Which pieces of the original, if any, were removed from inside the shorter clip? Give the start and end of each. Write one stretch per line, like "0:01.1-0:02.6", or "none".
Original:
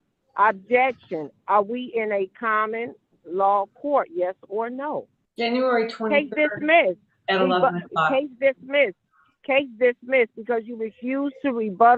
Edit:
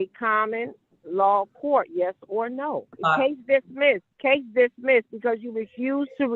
0:05.1-0:07.9
0:09.0-0:09.3